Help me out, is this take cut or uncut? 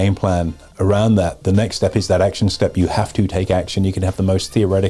uncut